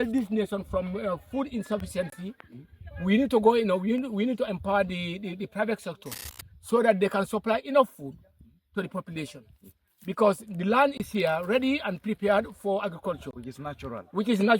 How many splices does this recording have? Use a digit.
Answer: 0